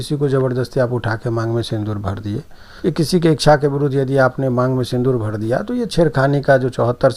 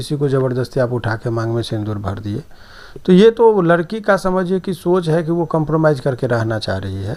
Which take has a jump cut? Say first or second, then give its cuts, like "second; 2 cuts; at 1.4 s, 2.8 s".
first; 1 cut; at 2.7 s